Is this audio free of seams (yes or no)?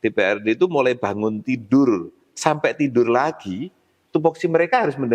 yes